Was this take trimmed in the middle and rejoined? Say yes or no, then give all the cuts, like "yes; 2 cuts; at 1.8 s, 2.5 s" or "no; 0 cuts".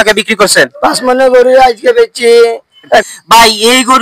yes; 1 cut; at 3.1 s